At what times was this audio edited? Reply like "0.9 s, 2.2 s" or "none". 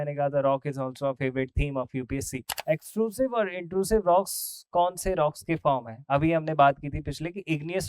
2.4 s